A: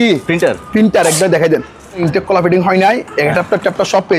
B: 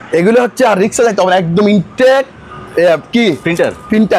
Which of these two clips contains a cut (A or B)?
A